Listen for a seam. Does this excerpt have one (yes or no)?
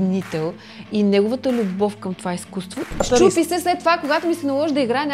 yes